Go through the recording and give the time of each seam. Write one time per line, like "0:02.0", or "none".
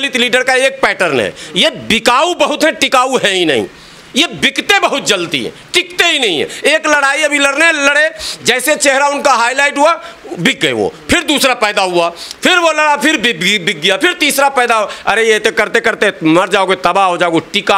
none